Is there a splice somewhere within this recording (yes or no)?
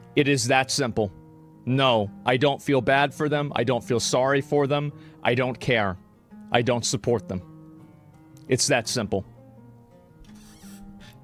no